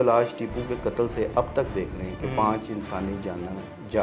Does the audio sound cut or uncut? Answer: uncut